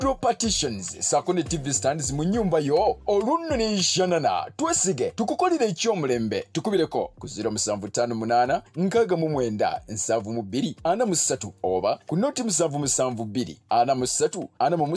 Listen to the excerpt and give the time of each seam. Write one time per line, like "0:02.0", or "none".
none

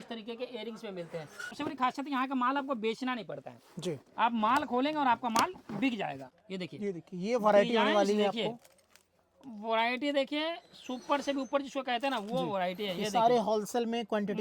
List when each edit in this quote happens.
0:01.6
0:06.3

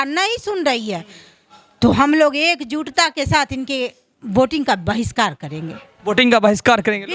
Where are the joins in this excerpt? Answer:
none

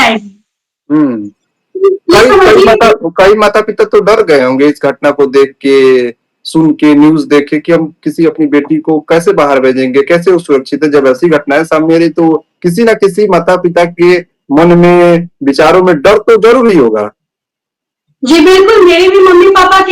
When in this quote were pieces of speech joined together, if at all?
none

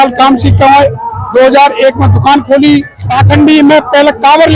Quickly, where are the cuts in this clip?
0:03.0

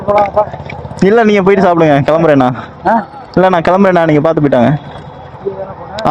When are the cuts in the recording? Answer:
none

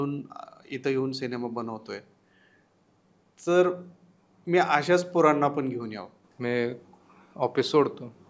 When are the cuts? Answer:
0:06.2

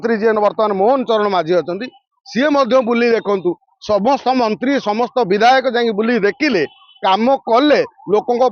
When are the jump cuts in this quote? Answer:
none

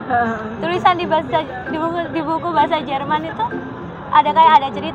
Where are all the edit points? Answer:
none

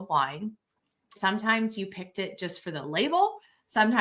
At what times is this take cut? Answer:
0:01.2

